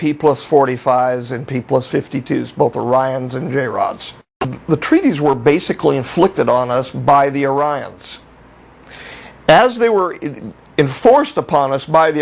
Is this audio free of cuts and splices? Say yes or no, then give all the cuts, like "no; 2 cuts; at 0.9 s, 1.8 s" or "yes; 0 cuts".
no; 1 cut; at 4.5 s